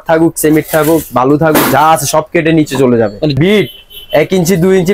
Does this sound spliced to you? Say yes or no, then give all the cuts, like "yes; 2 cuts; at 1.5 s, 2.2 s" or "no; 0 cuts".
yes; 1 cut; at 3.4 s